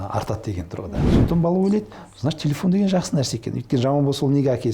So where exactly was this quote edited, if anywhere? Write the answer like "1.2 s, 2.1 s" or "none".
1.1 s